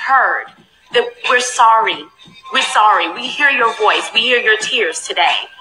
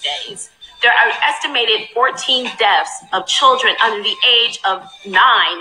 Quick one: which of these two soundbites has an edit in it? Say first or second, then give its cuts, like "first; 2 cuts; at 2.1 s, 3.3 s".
first; 1 cut; at 3.2 s